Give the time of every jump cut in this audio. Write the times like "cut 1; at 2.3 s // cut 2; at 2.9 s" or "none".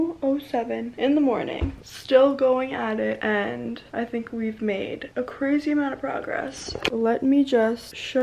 none

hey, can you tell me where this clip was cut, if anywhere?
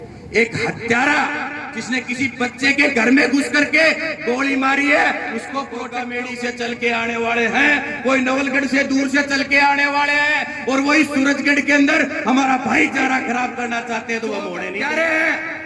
cut 1; at 6.0 s // cut 2; at 14.6 s

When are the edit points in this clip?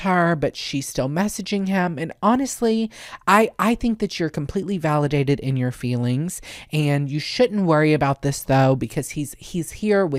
none

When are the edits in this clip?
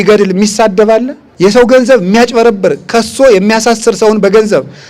cut 1; at 1.2 s

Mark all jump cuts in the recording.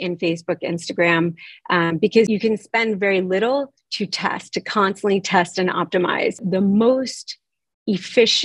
cut 1; at 2.3 s // cut 2; at 6.4 s

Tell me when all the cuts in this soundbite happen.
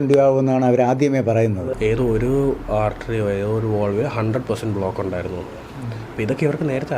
cut 1; at 1.7 s

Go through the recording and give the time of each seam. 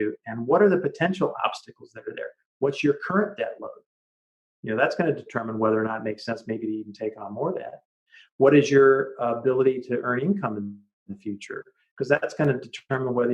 none

